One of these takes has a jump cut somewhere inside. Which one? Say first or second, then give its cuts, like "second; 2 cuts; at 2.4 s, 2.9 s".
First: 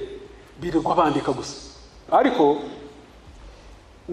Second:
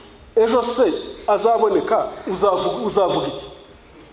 first; 1 cut; at 2.0 s